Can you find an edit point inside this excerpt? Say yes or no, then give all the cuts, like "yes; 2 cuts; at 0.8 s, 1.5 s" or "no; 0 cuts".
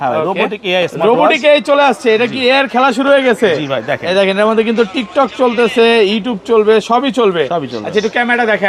no; 0 cuts